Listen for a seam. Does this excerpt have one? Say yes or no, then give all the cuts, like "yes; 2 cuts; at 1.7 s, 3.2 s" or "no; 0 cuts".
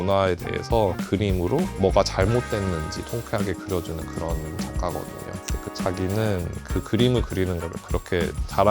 yes; 1 cut; at 1.0 s